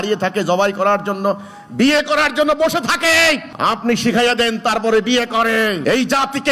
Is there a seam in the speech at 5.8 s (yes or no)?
yes